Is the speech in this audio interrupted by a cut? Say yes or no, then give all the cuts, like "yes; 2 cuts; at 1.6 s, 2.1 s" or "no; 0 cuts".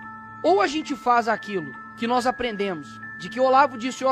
no; 0 cuts